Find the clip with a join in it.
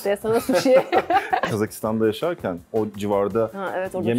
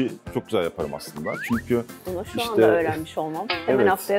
first; 1 cut; at 1.5 s

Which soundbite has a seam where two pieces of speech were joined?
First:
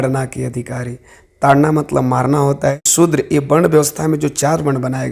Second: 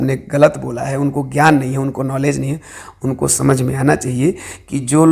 first; 1 cut; at 2.9 s

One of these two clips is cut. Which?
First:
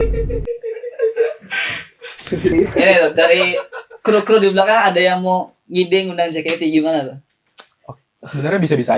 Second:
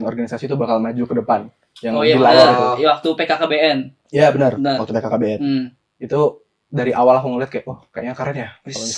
first; 1 cut; at 2.5 s

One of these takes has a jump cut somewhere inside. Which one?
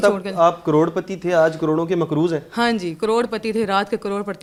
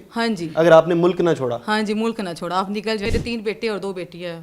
second; 1 cut; at 3.0 s

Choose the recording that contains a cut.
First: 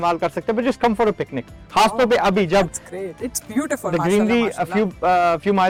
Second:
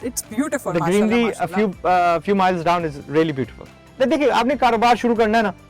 second; 1 cut; at 3.9 s

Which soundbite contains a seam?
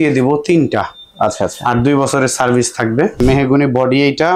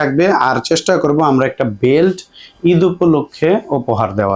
first; 1 cut; at 3.2 s

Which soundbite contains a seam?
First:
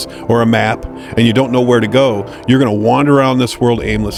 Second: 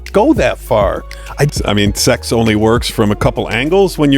second; 1 cut; at 1.5 s

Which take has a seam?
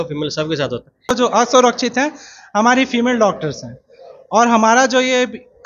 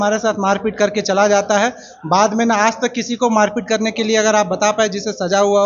first; 1 cut; at 1.1 s

